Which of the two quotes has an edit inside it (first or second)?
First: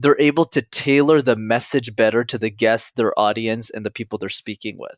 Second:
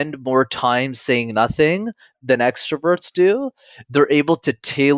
second